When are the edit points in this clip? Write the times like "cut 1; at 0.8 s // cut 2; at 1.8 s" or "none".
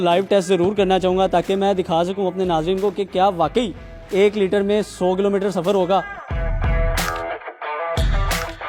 none